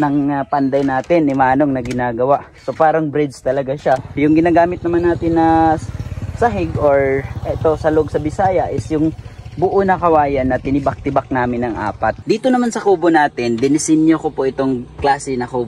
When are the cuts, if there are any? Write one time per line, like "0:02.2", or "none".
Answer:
0:04.1
0:12.2

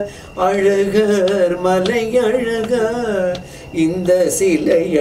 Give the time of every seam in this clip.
none

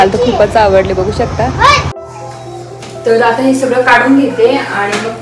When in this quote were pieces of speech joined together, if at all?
0:02.1

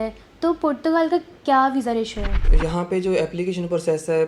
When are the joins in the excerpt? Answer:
0:02.5

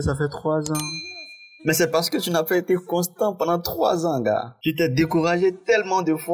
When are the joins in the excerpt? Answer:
none

